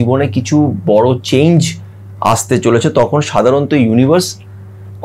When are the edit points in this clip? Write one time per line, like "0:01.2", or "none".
none